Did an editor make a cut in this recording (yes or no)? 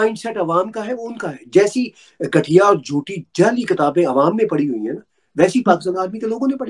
no